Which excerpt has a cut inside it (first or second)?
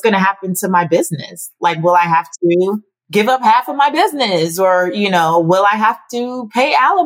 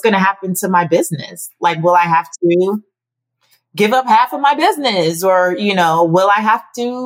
first